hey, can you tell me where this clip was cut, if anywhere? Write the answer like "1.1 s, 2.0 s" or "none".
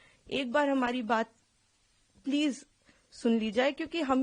none